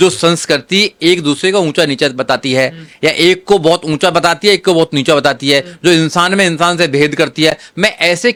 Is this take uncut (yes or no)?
yes